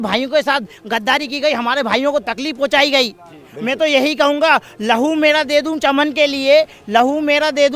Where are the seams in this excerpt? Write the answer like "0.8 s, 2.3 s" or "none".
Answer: none